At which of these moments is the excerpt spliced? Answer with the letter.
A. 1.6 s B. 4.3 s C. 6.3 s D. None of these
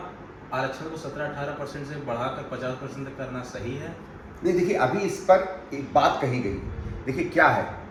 D